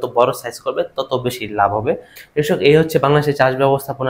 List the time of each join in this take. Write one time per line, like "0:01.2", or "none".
0:02.1